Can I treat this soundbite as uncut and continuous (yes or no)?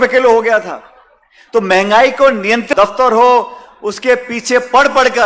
no